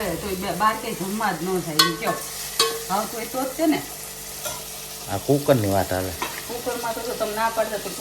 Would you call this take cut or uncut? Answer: uncut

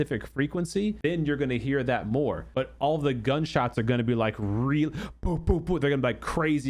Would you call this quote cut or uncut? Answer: cut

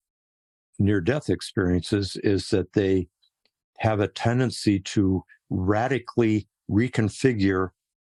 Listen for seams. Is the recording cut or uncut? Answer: uncut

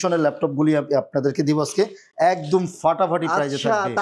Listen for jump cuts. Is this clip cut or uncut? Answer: uncut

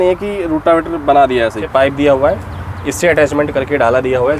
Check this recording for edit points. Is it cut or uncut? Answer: cut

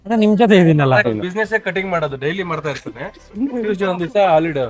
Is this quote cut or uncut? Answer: cut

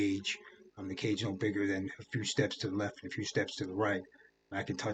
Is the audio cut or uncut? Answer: uncut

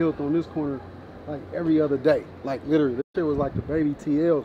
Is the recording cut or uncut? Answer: uncut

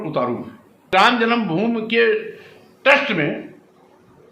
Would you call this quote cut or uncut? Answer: cut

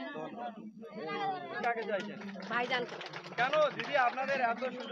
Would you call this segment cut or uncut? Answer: cut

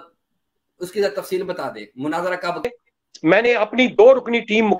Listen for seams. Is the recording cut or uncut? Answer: cut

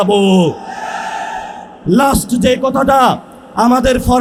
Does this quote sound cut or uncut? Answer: uncut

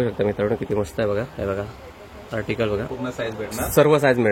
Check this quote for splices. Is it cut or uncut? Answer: cut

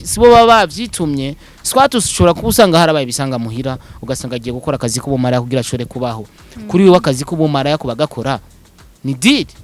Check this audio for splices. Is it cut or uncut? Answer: uncut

